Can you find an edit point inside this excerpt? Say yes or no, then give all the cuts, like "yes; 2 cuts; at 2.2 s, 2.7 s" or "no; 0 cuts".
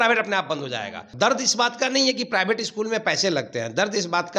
yes; 1 cut; at 1.1 s